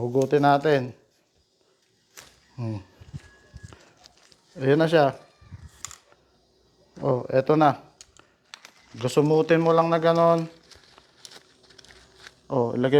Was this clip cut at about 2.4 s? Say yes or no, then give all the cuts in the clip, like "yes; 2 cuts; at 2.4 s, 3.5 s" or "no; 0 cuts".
no; 0 cuts